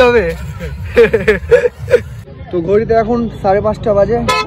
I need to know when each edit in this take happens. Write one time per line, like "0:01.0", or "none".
none

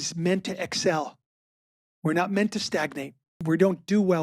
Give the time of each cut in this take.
0:03.3

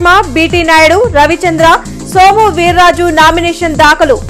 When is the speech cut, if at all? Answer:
none

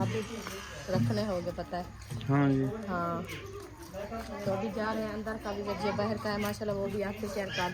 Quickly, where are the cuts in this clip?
none

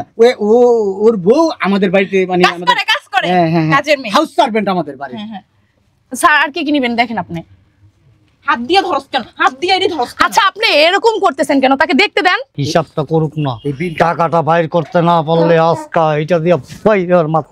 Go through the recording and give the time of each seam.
0:12.5

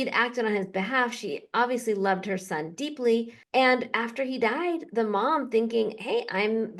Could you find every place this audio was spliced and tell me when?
0:03.4

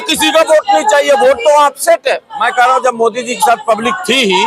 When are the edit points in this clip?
0:02.4

